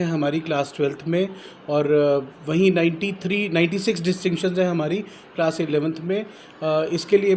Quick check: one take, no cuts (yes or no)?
yes